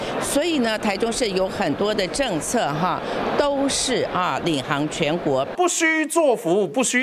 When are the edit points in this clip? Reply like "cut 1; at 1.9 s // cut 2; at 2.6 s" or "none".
cut 1; at 5.5 s

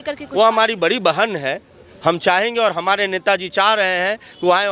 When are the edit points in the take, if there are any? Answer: none

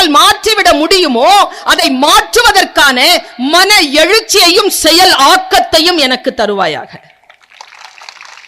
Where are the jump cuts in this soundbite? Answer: none

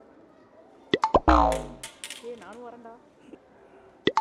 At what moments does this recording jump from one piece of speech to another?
none

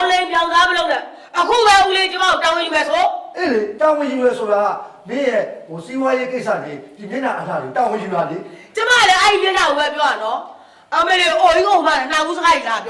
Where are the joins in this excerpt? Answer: none

